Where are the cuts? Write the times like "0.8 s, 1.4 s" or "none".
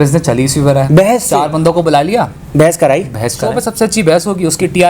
1.2 s, 3.6 s